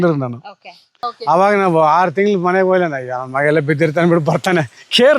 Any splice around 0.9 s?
yes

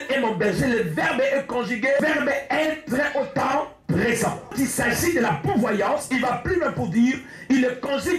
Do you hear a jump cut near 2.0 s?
yes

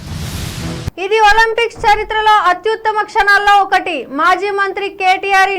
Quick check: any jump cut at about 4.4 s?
no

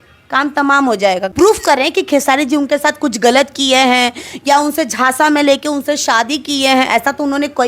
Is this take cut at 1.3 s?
yes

